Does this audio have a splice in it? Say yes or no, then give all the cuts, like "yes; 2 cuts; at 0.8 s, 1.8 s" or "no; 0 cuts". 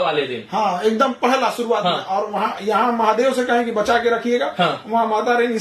no; 0 cuts